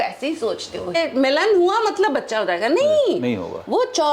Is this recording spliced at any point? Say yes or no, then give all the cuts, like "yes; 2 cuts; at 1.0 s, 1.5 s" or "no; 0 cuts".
yes; 1 cut; at 0.9 s